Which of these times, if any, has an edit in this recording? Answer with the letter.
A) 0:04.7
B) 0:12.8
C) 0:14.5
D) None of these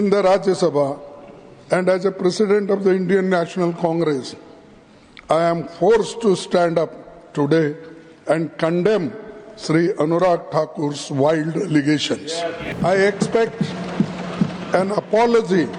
B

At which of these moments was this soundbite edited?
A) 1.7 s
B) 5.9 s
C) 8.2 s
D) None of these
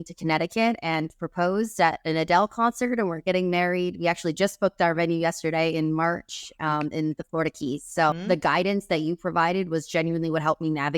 C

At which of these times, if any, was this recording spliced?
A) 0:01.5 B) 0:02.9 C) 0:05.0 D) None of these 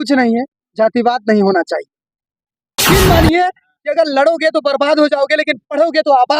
B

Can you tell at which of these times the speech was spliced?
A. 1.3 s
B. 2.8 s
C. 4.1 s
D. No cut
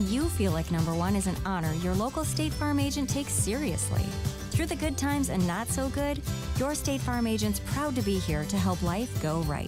D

